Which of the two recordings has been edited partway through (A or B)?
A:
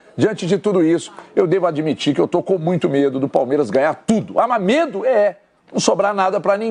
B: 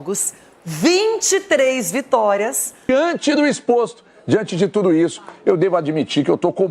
B